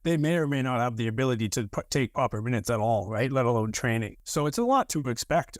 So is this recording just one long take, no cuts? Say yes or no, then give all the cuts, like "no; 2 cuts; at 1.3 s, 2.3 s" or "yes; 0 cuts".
no; 1 cut; at 4.2 s